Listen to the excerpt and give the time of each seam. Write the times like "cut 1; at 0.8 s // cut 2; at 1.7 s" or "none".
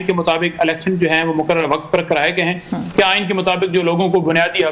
none